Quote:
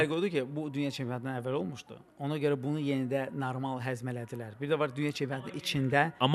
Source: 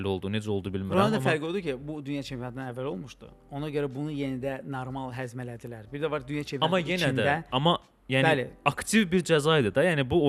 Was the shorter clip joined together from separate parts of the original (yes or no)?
no